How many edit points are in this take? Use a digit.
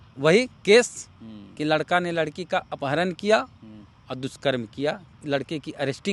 1